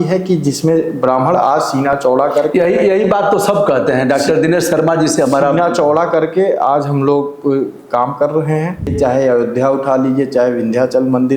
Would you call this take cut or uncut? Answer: cut